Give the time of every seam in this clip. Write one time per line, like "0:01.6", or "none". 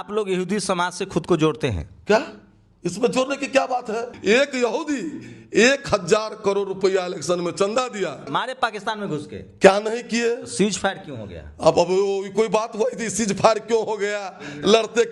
0:04.1
0:08.3

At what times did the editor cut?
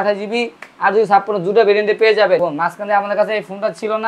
0:02.5

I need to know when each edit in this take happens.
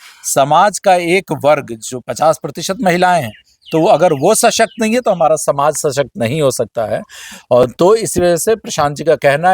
none

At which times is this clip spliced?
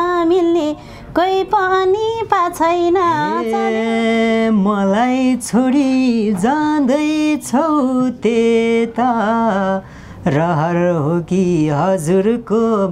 0:03.4

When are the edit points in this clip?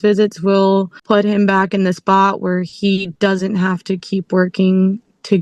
0:01.0

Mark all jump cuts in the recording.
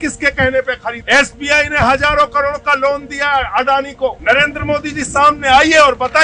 0:01.0
0:04.2

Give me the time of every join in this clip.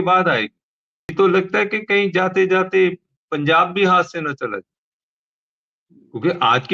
0:01.1

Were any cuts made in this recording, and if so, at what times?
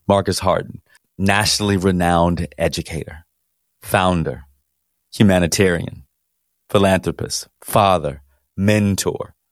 0:01.0
0:05.0

